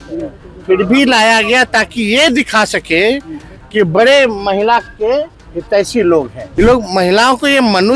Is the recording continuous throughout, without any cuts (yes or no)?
no